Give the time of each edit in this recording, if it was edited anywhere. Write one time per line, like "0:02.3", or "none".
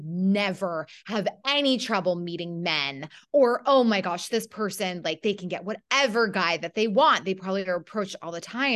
none